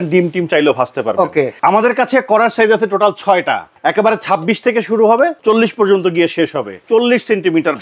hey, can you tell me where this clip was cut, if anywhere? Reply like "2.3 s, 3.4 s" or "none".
1.5 s, 3.7 s, 5.4 s, 6.8 s